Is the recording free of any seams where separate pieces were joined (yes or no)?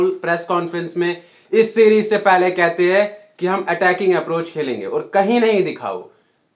yes